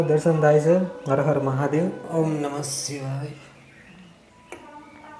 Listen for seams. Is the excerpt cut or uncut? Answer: uncut